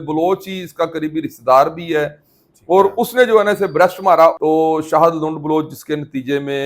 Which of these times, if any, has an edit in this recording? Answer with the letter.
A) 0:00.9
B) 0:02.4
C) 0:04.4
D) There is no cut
C